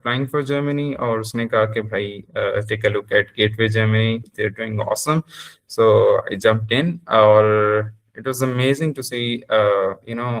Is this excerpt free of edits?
yes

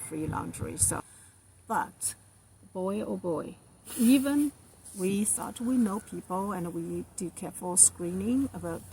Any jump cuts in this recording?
yes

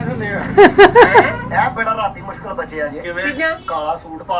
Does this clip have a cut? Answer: no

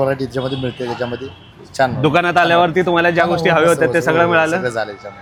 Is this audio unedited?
yes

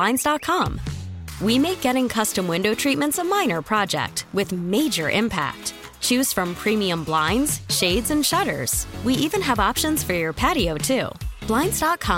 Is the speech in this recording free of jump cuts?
yes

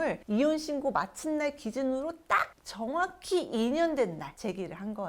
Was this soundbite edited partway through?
no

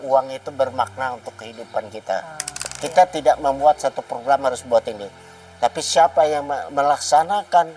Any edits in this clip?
yes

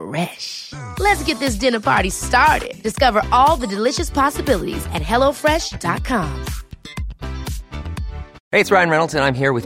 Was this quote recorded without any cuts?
no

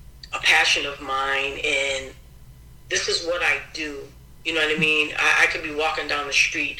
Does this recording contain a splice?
no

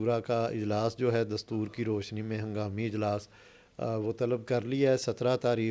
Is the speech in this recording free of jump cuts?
yes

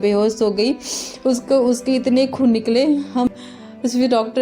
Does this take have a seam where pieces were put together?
yes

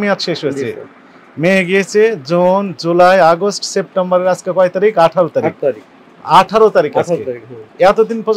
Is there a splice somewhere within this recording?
no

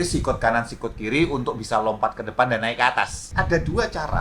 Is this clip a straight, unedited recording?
no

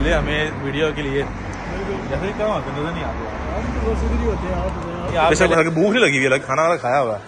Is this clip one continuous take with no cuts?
no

